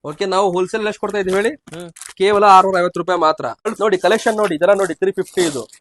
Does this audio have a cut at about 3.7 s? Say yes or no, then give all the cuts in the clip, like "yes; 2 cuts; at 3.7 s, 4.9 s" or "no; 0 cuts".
yes; 1 cut; at 3.7 s